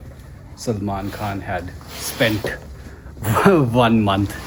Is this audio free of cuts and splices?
yes; 0 cuts

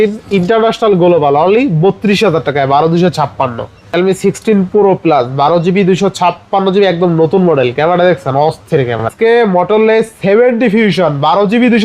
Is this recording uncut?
no; 2 cuts; at 3.9 s, 9.1 s

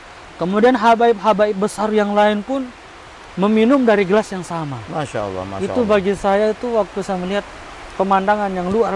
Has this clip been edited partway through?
no; 0 cuts

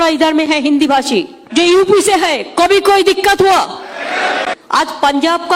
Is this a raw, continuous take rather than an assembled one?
no; 2 cuts; at 1.4 s, 4.6 s

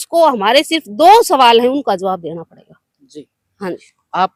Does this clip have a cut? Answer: no; 0 cuts

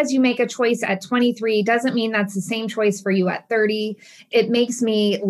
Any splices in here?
no; 0 cuts

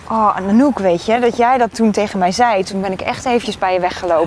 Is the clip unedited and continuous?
no; 1 cut; at 2.7 s

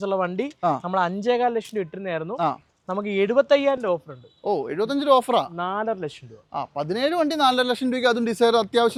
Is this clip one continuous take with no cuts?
yes; 0 cuts

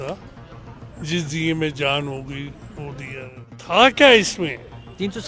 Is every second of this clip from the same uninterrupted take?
no; 1 cut; at 3.6 s

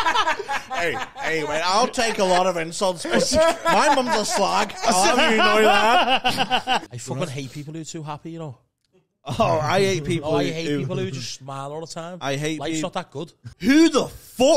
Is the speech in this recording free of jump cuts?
no; 2 cuts; at 6.9 s, 13.4 s

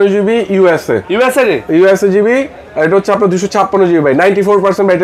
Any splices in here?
no; 0 cuts

